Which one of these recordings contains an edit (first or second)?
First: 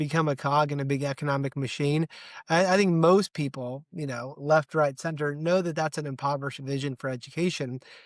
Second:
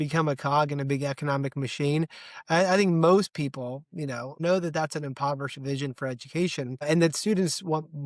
second